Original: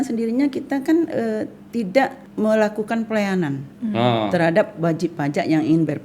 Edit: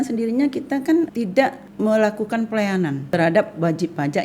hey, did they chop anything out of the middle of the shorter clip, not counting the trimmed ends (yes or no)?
yes